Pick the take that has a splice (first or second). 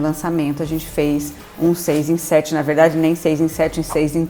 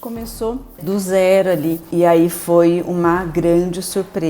second